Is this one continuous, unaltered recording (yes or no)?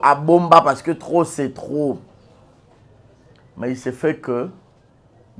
yes